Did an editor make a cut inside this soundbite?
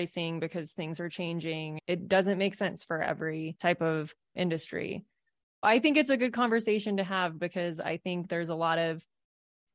yes; 2 cuts; at 1.7 s, 5.6 s

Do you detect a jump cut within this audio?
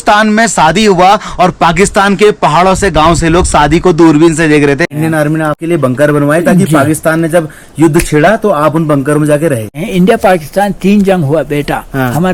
yes; 2 cuts; at 5.3 s, 9.8 s

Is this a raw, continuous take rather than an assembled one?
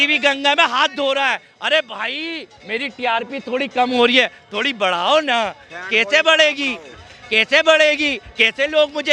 yes; 0 cuts

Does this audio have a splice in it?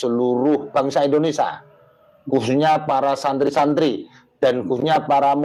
no; 0 cuts

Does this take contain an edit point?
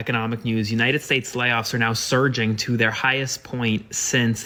no; 0 cuts

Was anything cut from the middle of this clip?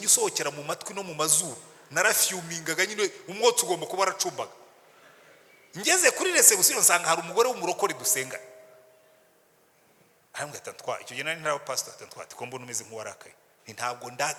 no; 0 cuts

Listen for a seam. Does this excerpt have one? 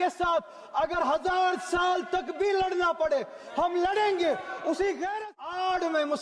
yes; 1 cut; at 5.2 s

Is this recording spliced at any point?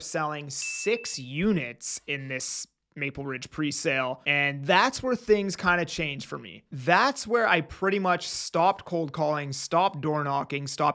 yes; 1 cut; at 4.2 s

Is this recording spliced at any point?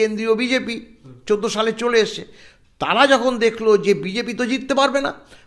no; 0 cuts

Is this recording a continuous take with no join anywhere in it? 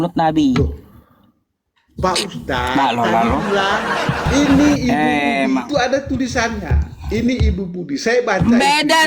no; 1 cut; at 4.3 s

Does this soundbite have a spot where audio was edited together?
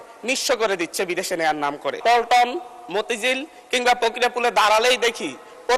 yes; 1 cut; at 2.0 s

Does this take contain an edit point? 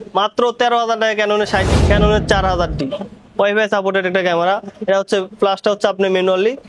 yes; 1 cut; at 1.6 s

